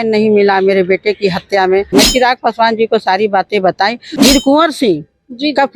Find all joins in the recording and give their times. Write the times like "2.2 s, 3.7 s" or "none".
1.9 s, 4.0 s